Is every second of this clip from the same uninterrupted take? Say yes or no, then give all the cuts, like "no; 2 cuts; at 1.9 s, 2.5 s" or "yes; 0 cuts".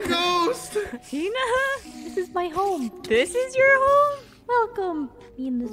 no; 1 cut; at 1.0 s